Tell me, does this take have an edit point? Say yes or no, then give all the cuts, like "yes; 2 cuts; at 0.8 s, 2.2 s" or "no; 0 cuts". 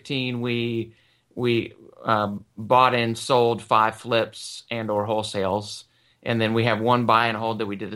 no; 0 cuts